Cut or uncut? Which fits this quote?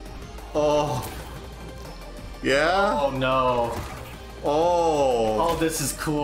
uncut